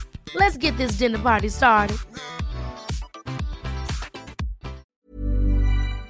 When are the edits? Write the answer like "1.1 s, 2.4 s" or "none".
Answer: 5.1 s